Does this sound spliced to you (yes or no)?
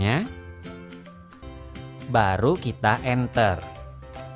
yes